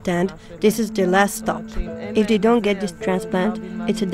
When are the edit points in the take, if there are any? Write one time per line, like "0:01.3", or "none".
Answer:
none